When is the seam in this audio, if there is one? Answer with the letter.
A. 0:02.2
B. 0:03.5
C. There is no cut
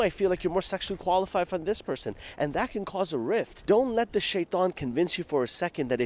B